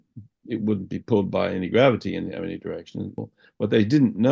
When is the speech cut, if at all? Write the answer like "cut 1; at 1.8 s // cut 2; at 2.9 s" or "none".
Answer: cut 1; at 3.2 s